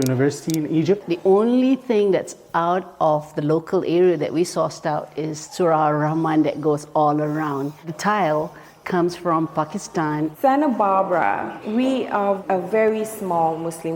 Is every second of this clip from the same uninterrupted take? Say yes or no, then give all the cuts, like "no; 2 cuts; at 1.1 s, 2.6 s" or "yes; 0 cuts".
no; 3 cuts; at 1.1 s, 5.4 s, 10.4 s